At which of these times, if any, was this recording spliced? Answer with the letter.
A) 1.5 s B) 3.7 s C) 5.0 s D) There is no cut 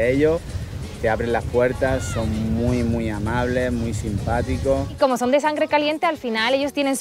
C